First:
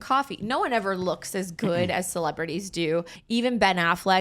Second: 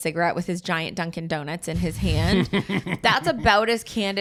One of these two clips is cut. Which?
first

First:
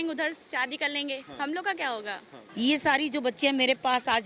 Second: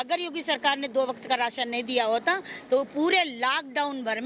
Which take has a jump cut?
first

